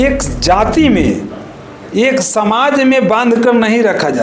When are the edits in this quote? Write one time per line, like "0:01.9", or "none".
none